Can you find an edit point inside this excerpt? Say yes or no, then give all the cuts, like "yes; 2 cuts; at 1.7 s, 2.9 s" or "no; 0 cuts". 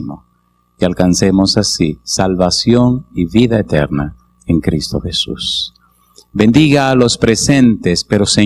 no; 0 cuts